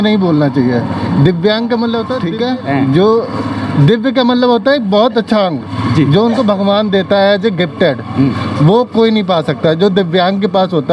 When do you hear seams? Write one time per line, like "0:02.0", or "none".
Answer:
0:02.2

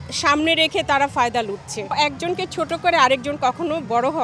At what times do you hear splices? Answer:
0:01.9

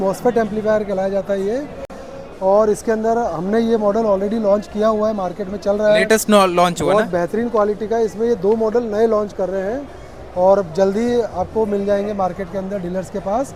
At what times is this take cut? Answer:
none

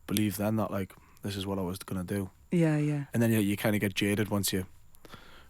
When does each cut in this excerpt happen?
0:03.0

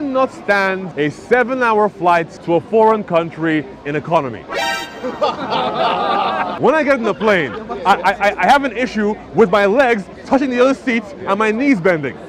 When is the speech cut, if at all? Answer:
0:00.9
0:02.3
0:06.5

